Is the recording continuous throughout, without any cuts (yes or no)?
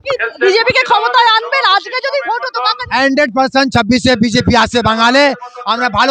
yes